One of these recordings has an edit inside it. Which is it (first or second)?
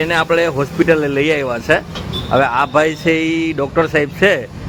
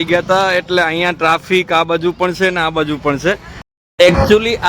second